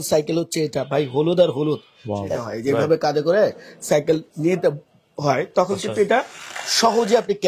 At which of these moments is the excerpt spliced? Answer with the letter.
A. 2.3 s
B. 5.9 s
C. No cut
A